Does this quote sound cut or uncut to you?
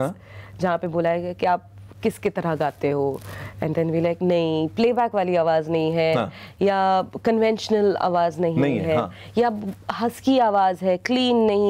uncut